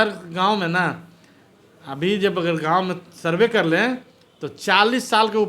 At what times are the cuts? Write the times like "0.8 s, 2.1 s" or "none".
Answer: none